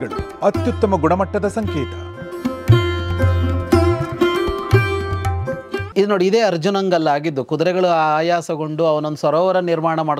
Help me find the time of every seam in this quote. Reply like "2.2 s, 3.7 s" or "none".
5.9 s

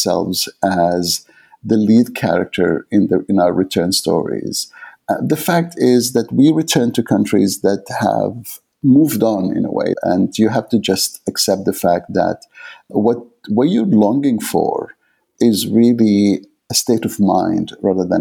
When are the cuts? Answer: 10.0 s, 12.9 s, 15.3 s, 16.6 s

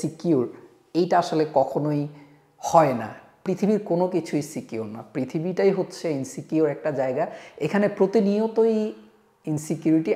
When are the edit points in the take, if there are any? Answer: none

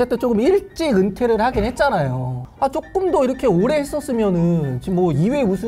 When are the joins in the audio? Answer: 2.4 s

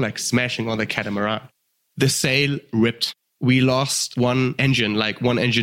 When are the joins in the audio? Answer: 1.7 s, 3.3 s, 4.3 s

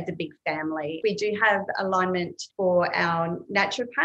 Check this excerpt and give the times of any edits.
1.0 s, 2.4 s

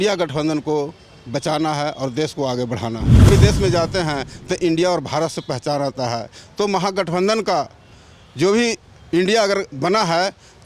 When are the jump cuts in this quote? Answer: 3.3 s

